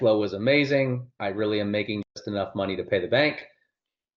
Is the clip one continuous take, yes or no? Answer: yes